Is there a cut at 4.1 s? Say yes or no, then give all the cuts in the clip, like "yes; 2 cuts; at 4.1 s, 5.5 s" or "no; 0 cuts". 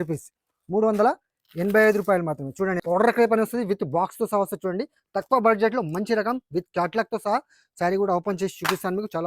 no; 1 cut; at 2.8 s